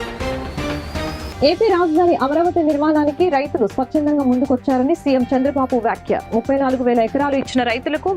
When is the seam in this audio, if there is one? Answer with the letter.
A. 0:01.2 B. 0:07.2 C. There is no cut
A